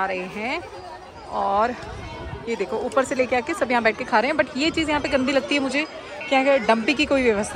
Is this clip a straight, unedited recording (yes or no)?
yes